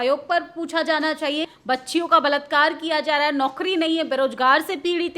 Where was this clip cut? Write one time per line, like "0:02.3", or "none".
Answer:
0:01.5